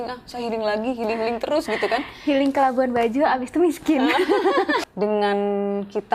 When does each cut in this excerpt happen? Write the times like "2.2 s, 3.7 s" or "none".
4.9 s